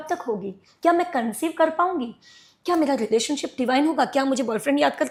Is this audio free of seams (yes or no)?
yes